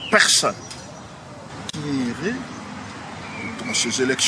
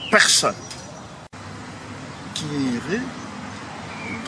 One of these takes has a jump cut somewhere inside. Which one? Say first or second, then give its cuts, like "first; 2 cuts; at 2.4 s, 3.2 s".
first; 1 cut; at 1.7 s